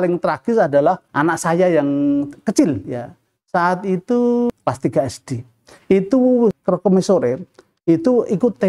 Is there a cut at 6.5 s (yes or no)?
yes